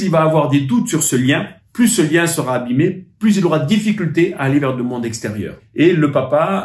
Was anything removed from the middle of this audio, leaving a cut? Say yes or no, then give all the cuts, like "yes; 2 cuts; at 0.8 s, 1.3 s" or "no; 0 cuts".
yes; 1 cut; at 5.6 s